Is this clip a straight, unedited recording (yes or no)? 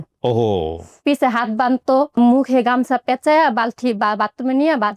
no